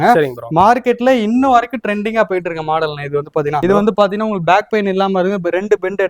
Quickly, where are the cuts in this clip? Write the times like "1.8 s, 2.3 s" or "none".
3.6 s